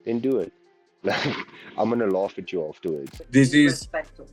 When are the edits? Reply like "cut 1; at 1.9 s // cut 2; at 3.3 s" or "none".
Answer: cut 1; at 3.1 s